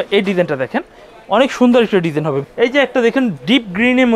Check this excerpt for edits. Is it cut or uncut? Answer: cut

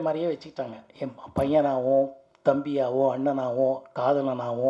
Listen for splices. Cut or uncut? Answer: uncut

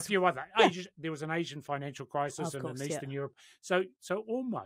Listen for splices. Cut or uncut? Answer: uncut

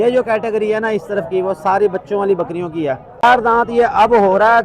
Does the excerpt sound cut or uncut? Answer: cut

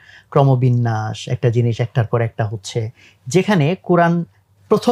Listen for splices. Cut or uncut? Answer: uncut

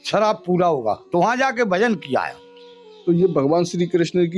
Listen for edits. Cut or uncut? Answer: uncut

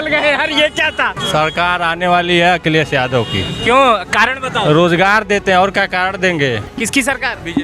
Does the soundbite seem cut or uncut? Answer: cut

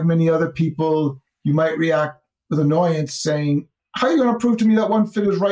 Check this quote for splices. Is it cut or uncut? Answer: cut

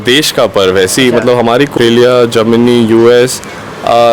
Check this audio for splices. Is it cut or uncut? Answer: cut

